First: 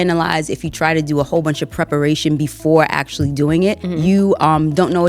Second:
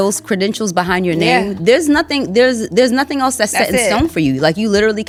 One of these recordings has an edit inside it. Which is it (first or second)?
first